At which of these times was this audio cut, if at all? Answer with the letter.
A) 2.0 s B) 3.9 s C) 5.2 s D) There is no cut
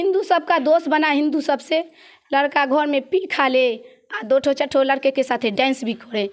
D